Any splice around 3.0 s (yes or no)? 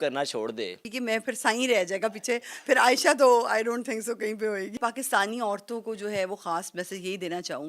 no